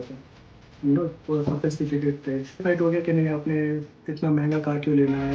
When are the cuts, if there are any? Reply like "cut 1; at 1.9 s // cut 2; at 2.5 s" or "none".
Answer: cut 1; at 2.6 s